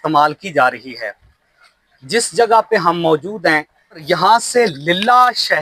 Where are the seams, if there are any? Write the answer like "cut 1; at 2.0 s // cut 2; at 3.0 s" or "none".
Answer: cut 1; at 4.0 s